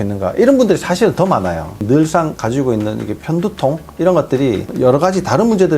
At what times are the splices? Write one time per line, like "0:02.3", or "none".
0:01.8